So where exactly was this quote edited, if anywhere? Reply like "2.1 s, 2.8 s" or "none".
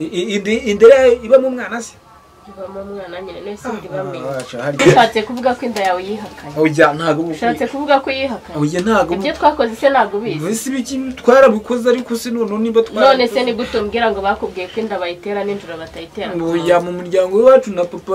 4.8 s